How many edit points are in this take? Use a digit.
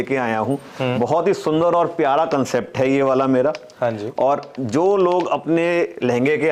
0